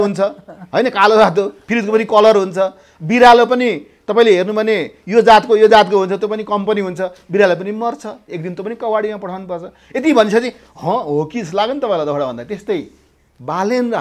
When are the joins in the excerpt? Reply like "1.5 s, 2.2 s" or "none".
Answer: none